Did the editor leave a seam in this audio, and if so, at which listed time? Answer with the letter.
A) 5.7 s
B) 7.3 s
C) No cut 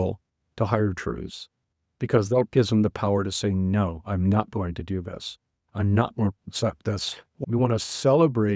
B